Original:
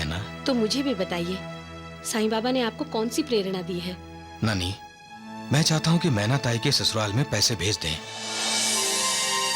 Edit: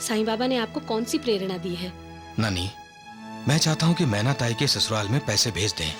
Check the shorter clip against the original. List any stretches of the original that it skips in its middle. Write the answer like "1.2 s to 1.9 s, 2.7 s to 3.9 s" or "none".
none